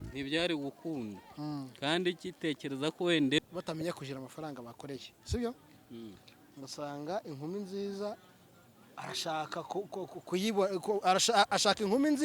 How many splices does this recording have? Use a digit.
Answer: 1